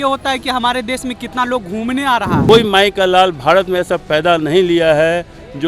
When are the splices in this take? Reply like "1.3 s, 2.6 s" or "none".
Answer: 2.5 s